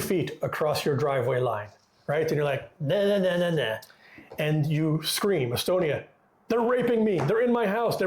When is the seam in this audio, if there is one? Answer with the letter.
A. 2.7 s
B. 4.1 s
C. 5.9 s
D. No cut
D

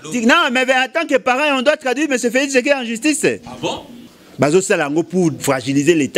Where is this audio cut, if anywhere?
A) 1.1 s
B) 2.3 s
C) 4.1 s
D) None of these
C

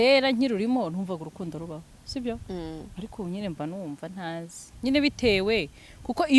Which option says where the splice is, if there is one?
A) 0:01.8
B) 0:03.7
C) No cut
C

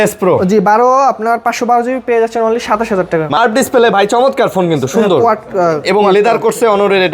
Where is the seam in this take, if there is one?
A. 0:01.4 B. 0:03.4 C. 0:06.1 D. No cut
B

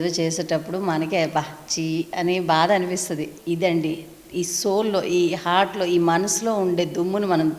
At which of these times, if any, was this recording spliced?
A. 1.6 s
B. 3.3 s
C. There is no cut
B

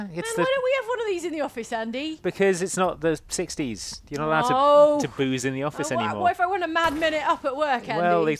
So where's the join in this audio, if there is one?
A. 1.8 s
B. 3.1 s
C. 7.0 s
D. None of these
D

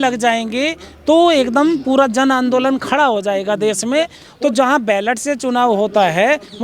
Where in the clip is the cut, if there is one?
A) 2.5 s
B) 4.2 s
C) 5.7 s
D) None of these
B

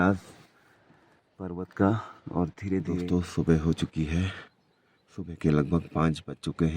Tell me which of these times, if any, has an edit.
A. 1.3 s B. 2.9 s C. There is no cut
B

